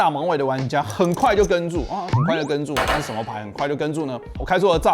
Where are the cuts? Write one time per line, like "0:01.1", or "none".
none